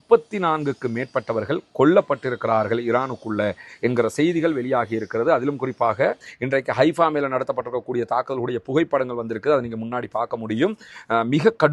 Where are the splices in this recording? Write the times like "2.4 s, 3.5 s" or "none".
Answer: 6.2 s